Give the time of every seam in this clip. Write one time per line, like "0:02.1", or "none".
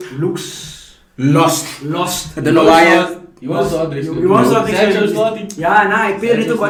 none